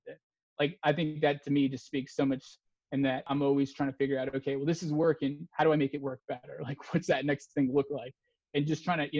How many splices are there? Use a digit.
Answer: 1